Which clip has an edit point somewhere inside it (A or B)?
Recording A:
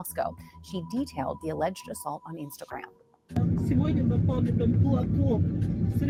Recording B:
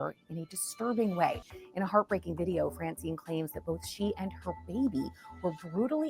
B